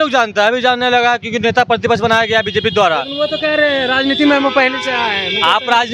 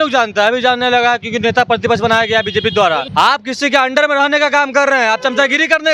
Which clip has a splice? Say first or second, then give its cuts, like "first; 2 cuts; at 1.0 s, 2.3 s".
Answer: second; 1 cut; at 3.1 s